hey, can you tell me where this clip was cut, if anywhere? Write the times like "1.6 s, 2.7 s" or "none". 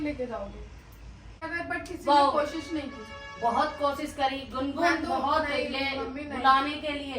1.5 s